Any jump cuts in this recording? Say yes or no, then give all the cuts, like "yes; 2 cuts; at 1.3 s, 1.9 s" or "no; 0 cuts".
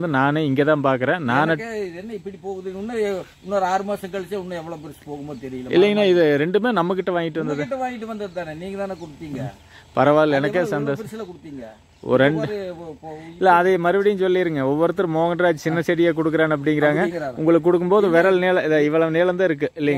no; 0 cuts